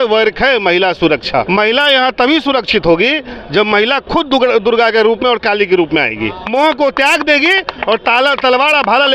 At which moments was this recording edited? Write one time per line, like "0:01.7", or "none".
0:01.5
0:06.5